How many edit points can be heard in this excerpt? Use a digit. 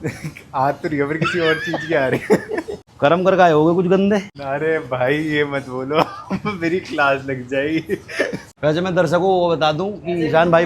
3